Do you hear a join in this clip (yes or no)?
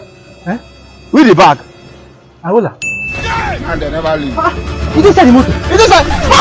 no